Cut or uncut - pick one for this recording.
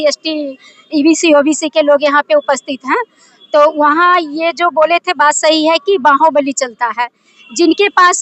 uncut